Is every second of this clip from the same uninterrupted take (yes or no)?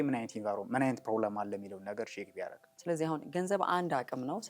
no